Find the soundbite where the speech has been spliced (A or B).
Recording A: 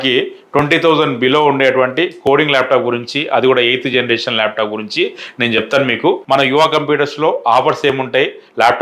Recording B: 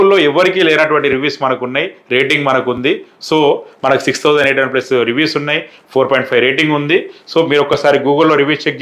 A